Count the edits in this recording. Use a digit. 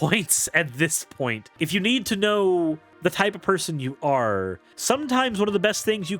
3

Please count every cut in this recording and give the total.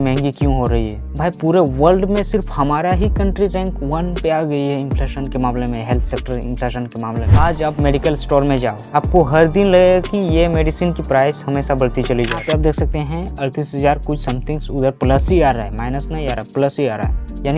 2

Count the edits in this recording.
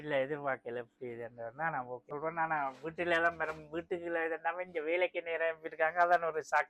1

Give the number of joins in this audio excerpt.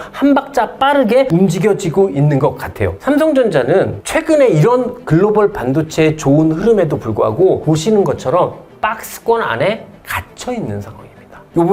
1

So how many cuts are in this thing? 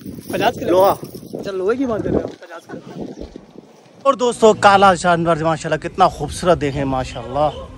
0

